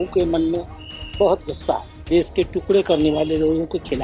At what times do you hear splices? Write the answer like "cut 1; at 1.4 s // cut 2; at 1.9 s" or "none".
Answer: cut 1; at 1.9 s